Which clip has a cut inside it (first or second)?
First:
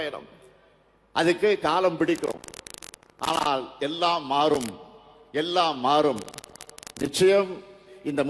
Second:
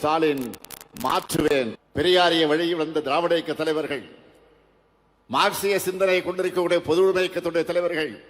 second